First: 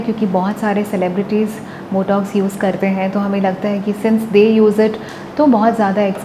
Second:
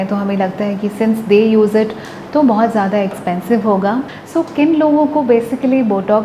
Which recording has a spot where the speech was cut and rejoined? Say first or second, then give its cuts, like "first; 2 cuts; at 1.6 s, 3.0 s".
second; 1 cut; at 4.2 s